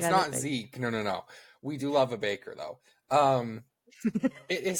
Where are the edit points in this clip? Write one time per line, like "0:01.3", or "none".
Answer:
none

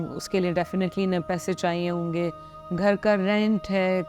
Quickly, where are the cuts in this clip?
none

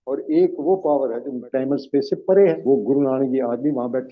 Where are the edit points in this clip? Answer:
0:01.4
0:02.7

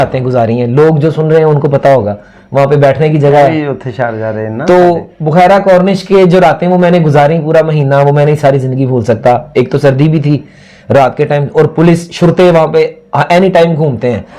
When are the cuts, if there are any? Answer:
none

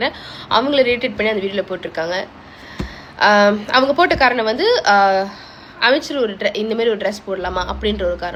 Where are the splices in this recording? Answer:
none

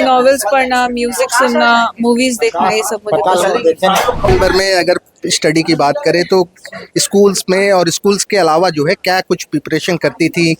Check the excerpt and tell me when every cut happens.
0:04.3

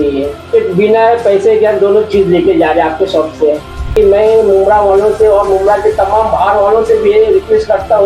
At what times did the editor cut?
0:03.9

